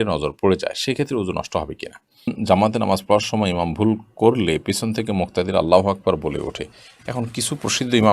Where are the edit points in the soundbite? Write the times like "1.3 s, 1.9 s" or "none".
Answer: 2.4 s